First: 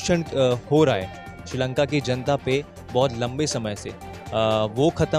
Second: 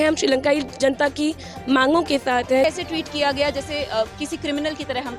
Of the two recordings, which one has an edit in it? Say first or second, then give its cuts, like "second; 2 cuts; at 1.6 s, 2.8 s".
second; 1 cut; at 2.6 s